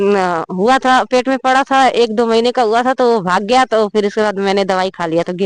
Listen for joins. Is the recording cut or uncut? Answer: uncut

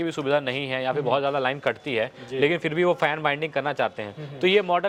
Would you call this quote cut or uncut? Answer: uncut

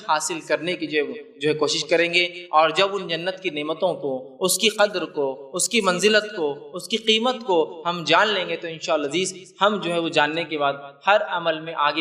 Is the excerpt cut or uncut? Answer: uncut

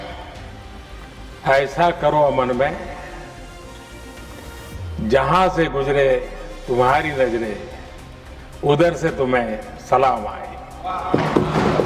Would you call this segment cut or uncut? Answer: uncut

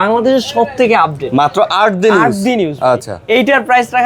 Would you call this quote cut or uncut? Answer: uncut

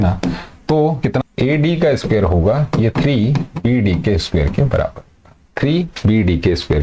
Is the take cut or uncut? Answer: cut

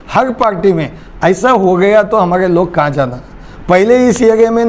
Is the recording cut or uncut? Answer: uncut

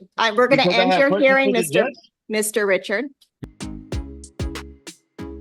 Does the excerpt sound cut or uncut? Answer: uncut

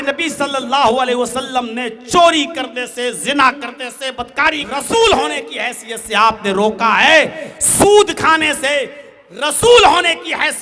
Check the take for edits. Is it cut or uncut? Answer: cut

